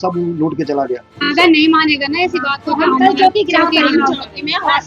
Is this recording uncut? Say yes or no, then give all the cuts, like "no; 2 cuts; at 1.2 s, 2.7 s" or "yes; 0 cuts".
no; 1 cut; at 1.1 s